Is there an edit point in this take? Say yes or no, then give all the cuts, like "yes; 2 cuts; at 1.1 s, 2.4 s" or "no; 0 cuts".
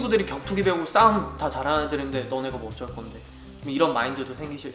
no; 0 cuts